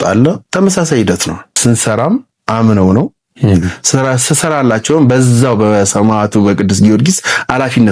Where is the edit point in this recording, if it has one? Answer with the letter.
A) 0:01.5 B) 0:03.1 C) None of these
A